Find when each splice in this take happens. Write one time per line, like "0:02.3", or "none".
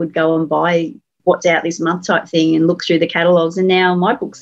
none

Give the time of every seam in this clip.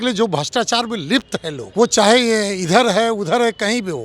0:01.6

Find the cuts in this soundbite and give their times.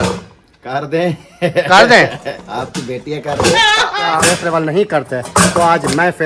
0:04.0

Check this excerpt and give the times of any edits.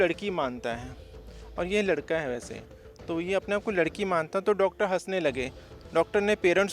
none

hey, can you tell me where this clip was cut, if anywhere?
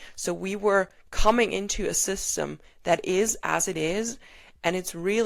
none

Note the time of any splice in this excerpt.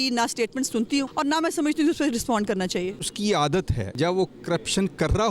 0:01.1
0:03.1
0:03.9

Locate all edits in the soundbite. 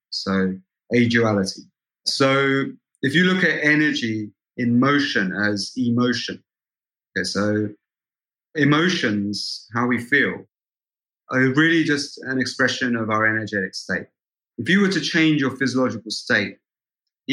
0:14.4

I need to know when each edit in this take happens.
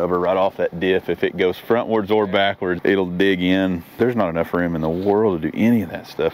0:02.8
0:04.0

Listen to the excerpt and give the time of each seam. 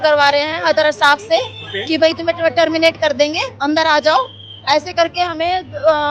none

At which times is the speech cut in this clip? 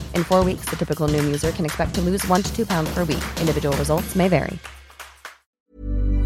0:05.0

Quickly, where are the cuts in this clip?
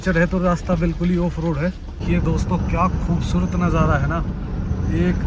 0:01.9

